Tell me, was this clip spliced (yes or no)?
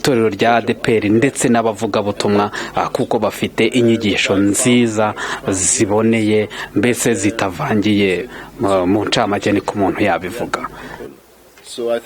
yes